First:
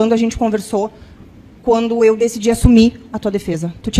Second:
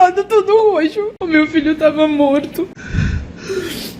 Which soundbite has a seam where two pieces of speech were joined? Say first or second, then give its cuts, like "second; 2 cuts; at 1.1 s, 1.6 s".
second; 2 cuts; at 1.2 s, 2.8 s